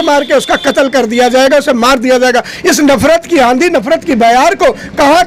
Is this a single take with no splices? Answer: yes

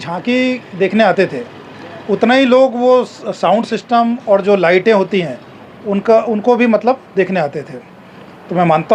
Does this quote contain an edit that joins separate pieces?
no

